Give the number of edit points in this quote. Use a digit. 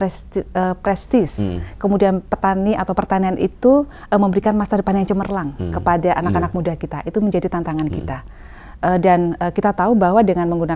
0